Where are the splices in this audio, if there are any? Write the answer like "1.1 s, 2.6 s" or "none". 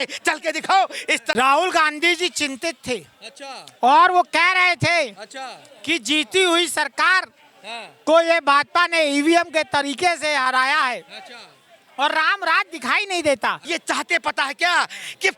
1.3 s, 13.7 s